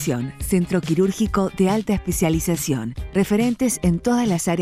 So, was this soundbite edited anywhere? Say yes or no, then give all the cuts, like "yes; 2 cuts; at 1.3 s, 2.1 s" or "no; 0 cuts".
no; 0 cuts